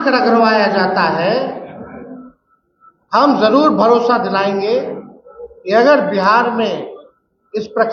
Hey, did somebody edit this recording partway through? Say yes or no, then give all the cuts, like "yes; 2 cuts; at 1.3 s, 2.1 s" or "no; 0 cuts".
no; 0 cuts